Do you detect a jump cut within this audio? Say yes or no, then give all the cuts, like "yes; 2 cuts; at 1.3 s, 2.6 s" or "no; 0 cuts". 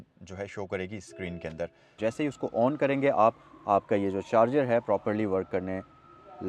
yes; 1 cut; at 1.9 s